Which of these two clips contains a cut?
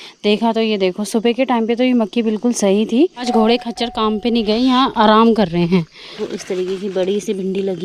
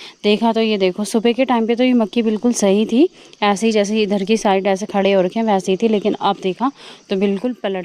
first; 2 cuts; at 3.3 s, 6.2 s

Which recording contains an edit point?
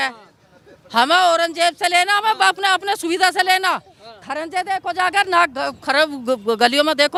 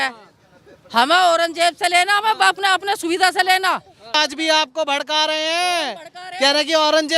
second; 1 cut; at 4.1 s

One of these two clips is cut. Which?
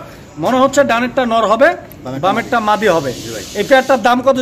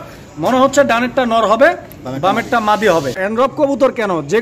second; 1 cut; at 3.2 s

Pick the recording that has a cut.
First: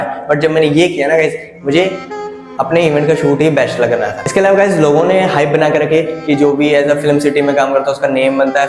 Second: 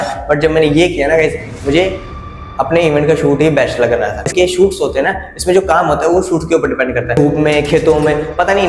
second; 1 cut; at 4.3 s

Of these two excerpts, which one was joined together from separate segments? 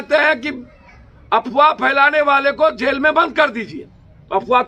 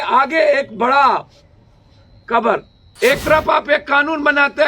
second; 1 cut; at 2.8 s

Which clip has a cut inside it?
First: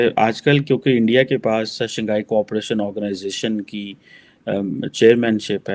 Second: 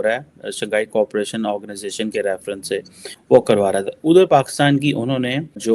second; 1 cut; at 3.1 s

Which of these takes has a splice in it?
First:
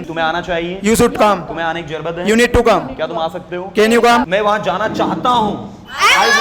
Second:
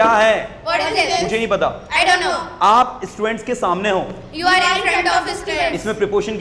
first; 1 cut; at 4.3 s

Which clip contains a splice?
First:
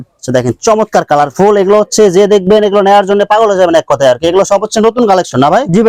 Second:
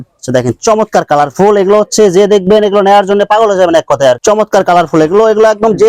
second; 1 cut; at 4.2 s

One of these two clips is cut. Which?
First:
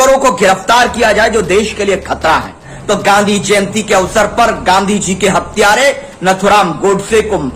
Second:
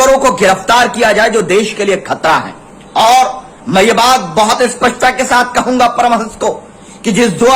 first; 1 cut; at 2.7 s

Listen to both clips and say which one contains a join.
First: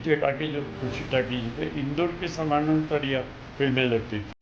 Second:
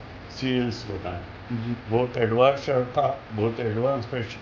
second; 1 cut; at 1.8 s

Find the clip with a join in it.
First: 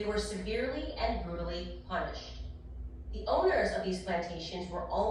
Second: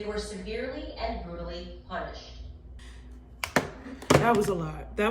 second; 1 cut; at 3.0 s

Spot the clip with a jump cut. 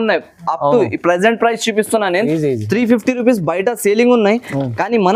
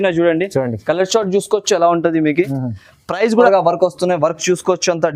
second; 1 cut; at 3.5 s

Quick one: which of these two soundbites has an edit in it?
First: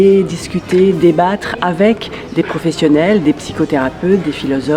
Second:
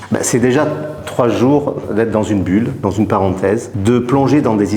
second; 1 cut; at 3.7 s

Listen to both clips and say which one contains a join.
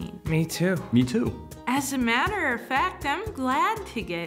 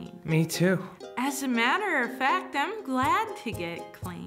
first; 2 cuts; at 0.8 s, 1.4 s

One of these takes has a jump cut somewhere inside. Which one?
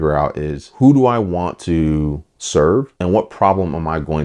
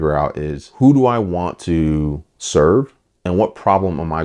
first; 1 cut; at 2.9 s

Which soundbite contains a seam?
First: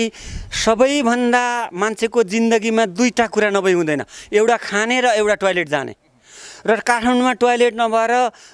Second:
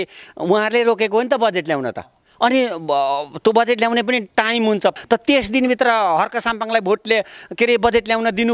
second; 1 cut; at 4.9 s

